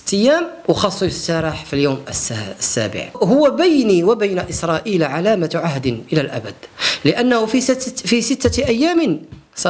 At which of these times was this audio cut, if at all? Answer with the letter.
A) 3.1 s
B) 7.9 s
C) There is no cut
A